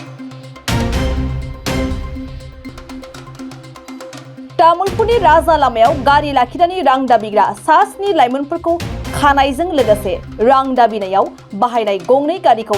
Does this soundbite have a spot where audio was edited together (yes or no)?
yes